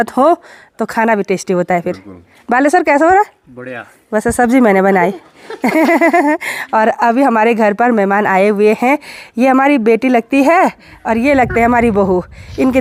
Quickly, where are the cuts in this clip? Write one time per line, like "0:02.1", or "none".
none